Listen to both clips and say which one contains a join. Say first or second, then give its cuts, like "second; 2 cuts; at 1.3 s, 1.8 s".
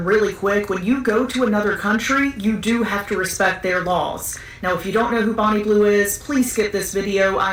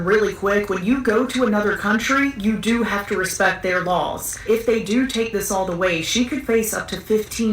second; 1 cut; at 4.3 s